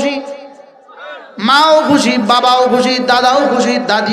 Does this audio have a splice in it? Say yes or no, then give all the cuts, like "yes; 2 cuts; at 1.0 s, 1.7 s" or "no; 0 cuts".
no; 0 cuts